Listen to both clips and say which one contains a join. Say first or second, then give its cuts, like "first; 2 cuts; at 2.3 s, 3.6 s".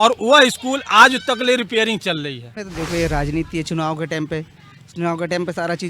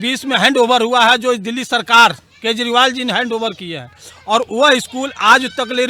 first; 1 cut; at 2.6 s